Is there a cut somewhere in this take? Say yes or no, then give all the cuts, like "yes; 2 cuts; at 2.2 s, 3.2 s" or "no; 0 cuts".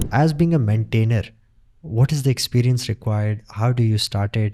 no; 0 cuts